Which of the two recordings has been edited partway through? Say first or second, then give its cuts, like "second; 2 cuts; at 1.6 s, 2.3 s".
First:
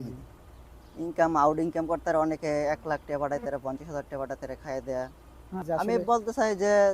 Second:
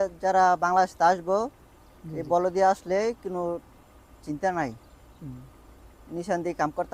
first; 1 cut; at 5.6 s